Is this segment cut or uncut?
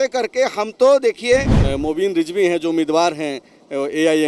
cut